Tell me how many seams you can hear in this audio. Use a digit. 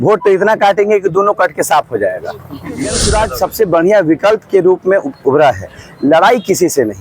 1